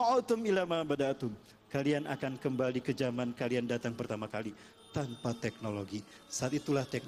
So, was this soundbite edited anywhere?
no; 0 cuts

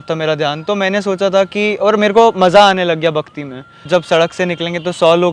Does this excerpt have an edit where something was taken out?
yes; 1 cut; at 3.8 s

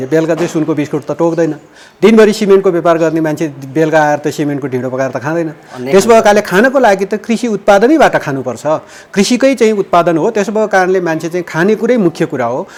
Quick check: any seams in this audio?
no; 0 cuts

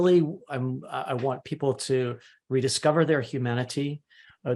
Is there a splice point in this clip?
no; 0 cuts

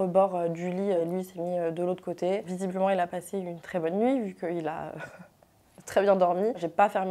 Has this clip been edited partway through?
no; 0 cuts

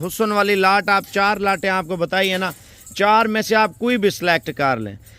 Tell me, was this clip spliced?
no; 0 cuts

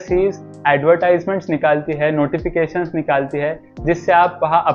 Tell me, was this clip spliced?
no; 0 cuts

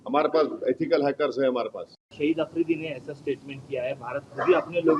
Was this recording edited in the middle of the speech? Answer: yes; 1 cut; at 2.0 s

